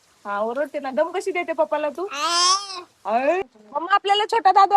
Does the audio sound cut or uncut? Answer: cut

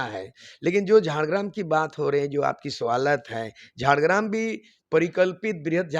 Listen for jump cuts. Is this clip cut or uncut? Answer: uncut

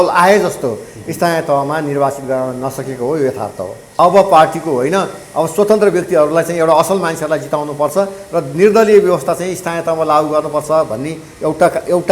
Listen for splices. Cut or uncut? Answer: cut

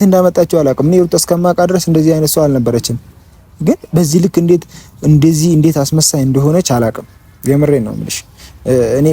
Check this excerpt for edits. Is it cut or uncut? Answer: uncut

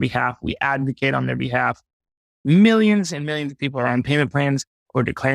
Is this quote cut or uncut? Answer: cut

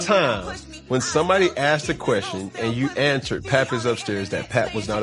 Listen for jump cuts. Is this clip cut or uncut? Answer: uncut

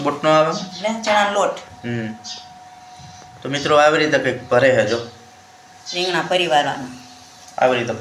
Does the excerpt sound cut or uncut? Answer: uncut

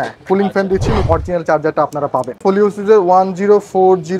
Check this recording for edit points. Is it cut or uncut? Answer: cut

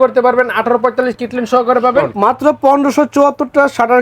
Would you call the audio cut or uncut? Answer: cut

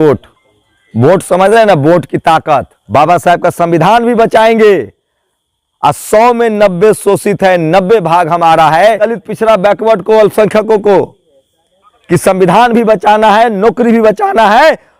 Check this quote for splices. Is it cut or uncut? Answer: cut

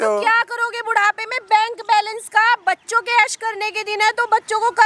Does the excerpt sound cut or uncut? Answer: uncut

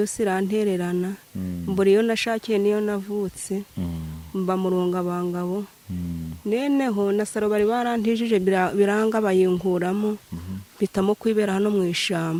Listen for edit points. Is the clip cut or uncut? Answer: uncut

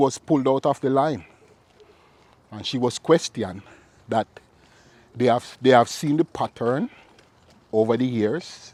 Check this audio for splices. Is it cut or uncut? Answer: uncut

